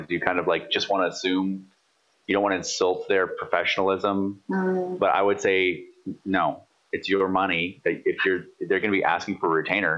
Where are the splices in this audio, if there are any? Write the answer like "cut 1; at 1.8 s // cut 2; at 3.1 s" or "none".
none